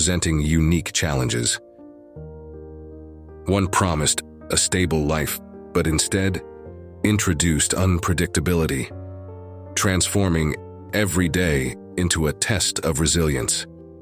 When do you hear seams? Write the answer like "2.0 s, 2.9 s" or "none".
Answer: 2.9 s